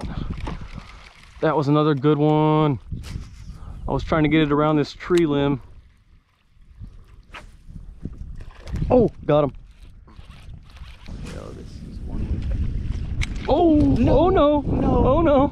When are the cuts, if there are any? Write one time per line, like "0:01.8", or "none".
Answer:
0:11.1